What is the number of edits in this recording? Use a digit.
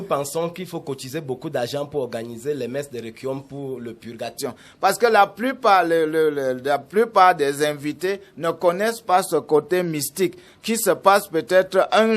1